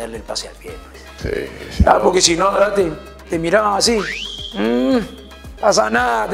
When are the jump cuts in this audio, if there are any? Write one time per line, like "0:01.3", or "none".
none